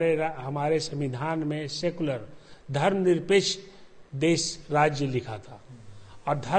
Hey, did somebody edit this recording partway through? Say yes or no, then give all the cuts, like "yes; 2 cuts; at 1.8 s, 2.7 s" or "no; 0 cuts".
no; 0 cuts